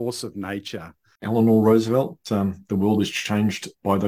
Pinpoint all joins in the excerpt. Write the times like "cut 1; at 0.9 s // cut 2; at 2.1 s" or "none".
cut 1; at 1.1 s